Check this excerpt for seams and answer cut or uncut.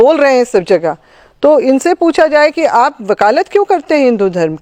uncut